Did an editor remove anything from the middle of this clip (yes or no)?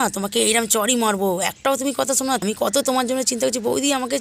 yes